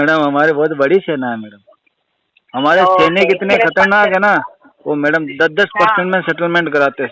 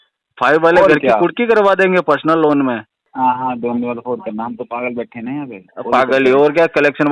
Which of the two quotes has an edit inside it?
second; 1 cut; at 3.1 s

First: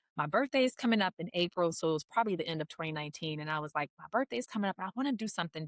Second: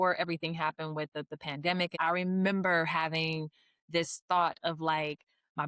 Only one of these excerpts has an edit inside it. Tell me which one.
second; 1 cut; at 1.9 s

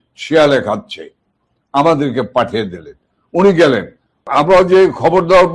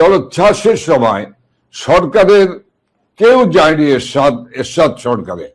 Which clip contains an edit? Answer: first; 1 cut; at 4.3 s

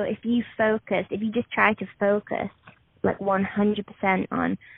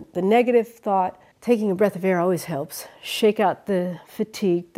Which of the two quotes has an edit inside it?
second; 1 cut; at 1.3 s

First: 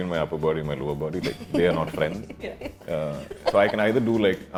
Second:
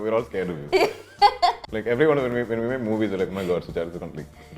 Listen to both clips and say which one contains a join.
second; 1 cut; at 1.7 s

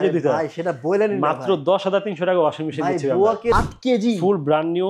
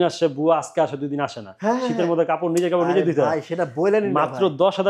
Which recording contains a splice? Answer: first; 1 cut; at 3.5 s

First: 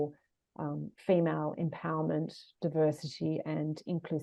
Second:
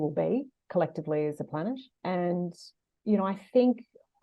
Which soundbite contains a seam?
second; 1 cut; at 1.9 s

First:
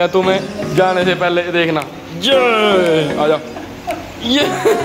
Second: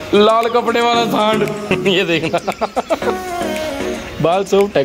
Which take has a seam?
second; 1 cut; at 1.7 s

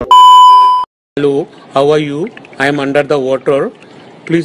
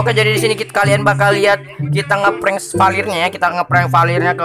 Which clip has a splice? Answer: first; 1 cut; at 0.9 s

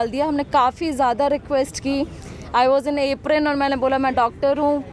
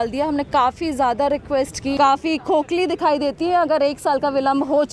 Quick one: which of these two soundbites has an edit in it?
second; 1 cut; at 2.0 s

